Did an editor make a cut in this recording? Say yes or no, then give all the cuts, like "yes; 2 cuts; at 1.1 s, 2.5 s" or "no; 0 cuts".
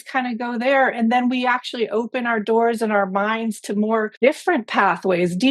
yes; 1 cut; at 4.1 s